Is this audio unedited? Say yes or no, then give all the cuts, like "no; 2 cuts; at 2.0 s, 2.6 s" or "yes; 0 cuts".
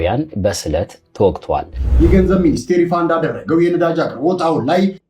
no; 1 cut; at 1.8 s